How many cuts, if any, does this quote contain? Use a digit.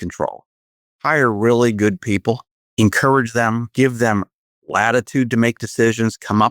2